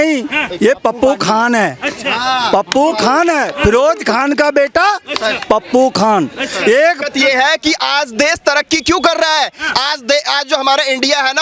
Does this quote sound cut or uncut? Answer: cut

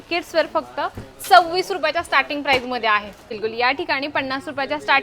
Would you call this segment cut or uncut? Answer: cut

